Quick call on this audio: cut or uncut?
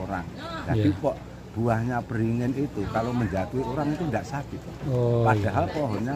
uncut